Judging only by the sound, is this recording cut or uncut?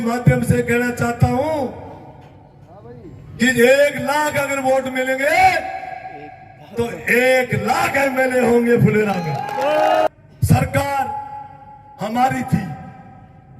cut